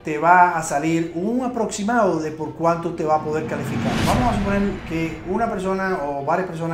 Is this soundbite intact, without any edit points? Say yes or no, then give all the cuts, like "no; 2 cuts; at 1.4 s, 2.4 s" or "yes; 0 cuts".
no; 1 cut; at 4.0 s